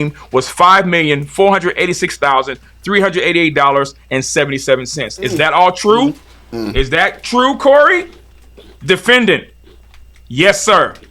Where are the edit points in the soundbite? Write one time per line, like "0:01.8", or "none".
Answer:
none